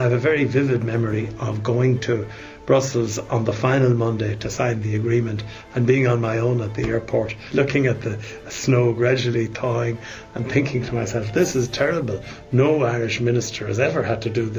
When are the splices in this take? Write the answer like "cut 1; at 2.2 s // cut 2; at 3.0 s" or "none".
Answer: cut 1; at 7.4 s